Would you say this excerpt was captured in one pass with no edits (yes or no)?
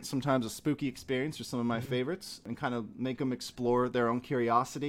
no